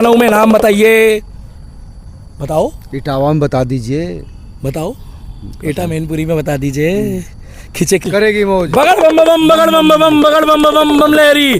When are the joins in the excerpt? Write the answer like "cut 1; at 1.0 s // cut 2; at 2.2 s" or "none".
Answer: cut 1; at 8.0 s